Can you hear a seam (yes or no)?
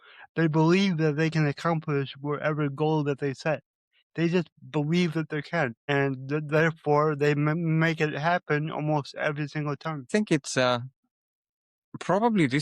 yes